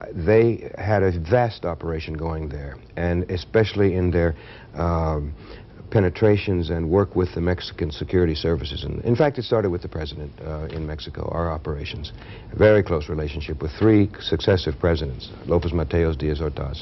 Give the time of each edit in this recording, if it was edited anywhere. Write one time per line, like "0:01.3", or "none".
none